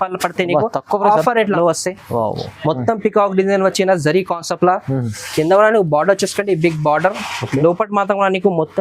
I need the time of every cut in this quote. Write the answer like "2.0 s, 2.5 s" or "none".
1.4 s